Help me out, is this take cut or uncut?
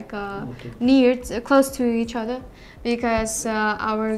uncut